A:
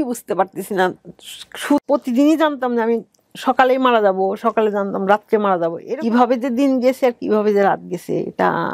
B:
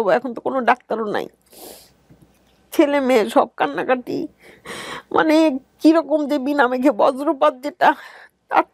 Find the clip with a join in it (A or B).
A